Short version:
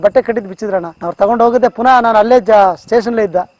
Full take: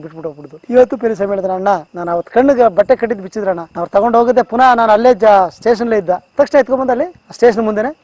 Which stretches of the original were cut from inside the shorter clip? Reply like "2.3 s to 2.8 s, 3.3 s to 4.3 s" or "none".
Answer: none